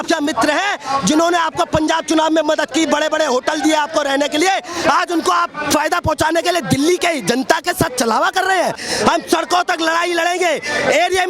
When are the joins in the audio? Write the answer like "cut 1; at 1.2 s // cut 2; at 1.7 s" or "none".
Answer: cut 1; at 8.8 s